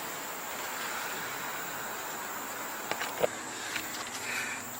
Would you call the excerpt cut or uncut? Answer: cut